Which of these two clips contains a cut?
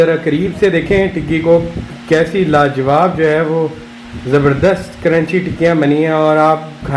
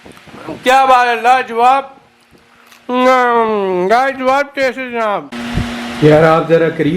second; 1 cut; at 5.3 s

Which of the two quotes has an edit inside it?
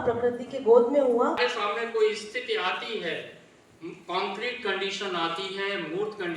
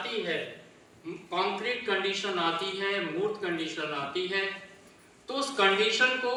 first; 1 cut; at 1.6 s

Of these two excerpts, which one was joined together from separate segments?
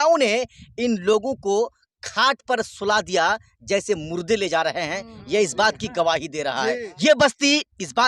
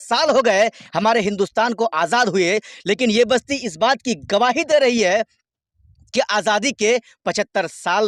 first; 1 cut; at 6.9 s

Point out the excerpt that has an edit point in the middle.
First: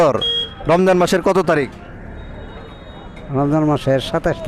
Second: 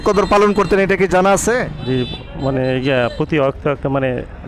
second; 1 cut; at 1.8 s

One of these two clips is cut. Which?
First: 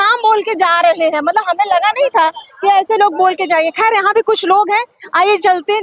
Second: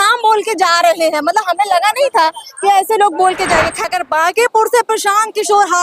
second; 1 cut; at 3.8 s

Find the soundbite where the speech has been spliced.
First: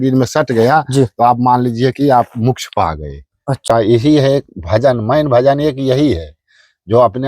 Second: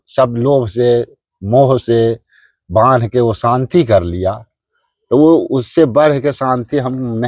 first; 1 cut; at 3.6 s

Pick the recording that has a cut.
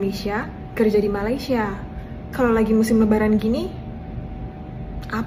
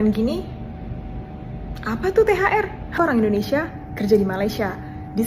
second; 1 cut; at 3.0 s

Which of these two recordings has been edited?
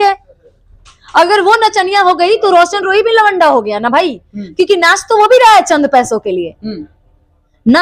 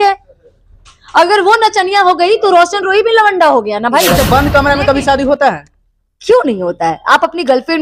second; 1 cut; at 4.1 s

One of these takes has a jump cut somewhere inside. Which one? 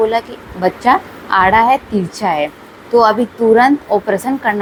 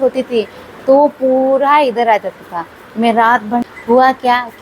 second; 1 cut; at 3.6 s

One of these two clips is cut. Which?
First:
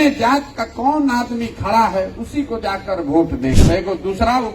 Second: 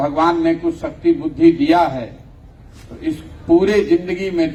first; 1 cut; at 3.6 s

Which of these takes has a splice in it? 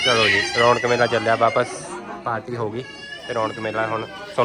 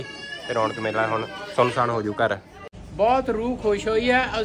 second; 1 cut; at 2.8 s

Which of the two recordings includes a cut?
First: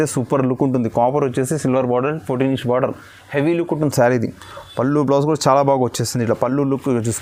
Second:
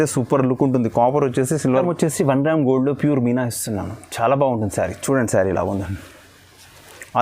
second; 1 cut; at 1.8 s

